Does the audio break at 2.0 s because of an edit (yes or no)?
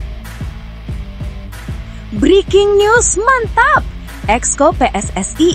yes